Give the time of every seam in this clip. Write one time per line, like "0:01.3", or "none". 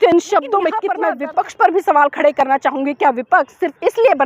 0:00.9